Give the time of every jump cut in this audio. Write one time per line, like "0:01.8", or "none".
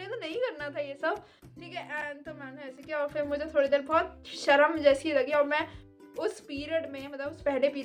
none